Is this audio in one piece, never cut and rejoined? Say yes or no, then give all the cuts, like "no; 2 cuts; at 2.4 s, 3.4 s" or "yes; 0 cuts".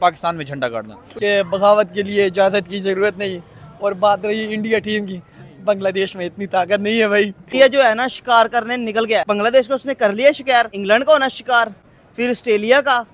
no; 4 cuts; at 1.0 s, 7.4 s, 9.2 s, 10.8 s